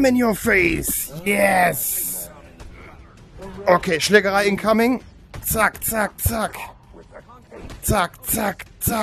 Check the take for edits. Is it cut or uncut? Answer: uncut